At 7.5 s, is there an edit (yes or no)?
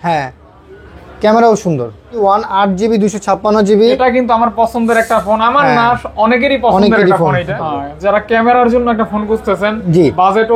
yes